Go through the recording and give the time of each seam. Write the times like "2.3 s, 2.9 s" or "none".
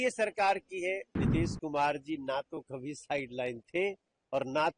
1.2 s